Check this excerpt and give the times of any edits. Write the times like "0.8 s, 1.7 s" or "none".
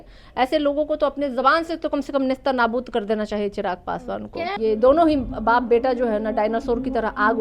4.6 s